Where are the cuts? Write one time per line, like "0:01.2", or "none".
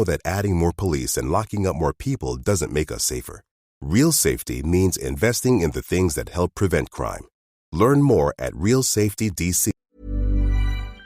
0:10.0

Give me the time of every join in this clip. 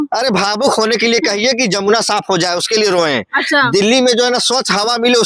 none

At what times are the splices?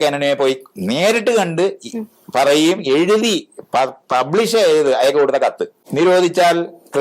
0:05.7

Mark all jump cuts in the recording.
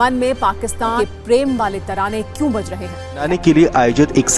0:00.9
0:03.2

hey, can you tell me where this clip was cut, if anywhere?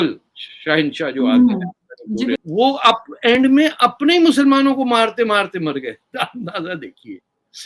0:02.4

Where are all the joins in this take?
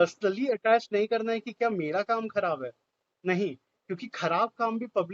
none

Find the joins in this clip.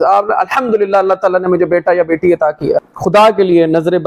0:02.9

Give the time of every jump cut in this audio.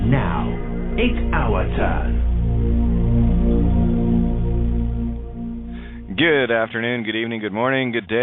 0:04.7

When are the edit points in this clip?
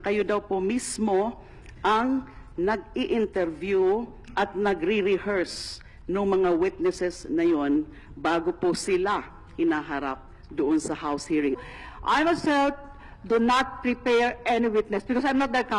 none

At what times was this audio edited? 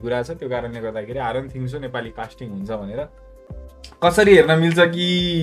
0:03.5

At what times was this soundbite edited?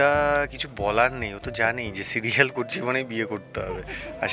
none

